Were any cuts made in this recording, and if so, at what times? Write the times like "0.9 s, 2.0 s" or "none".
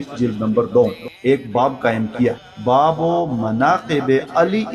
1.1 s, 2.6 s